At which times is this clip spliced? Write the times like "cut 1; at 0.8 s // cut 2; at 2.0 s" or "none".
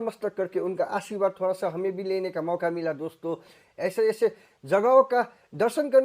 none

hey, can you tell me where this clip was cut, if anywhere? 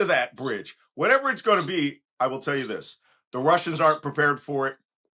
none

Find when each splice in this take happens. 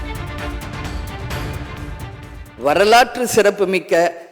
cut 1; at 2.6 s

